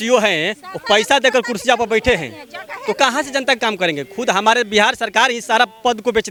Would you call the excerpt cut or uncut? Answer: uncut